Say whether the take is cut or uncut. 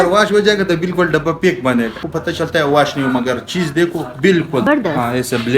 cut